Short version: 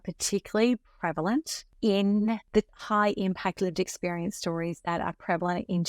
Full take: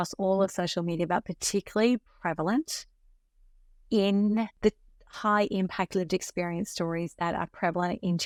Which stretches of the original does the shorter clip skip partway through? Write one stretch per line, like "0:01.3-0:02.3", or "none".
0:02.8-0:03.7
0:04.9-0:05.1